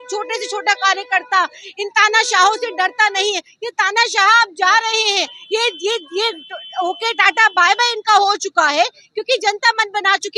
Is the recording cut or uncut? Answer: uncut